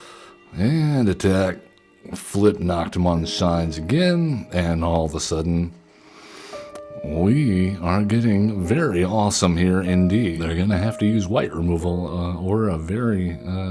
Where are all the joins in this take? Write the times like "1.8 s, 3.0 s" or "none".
10.4 s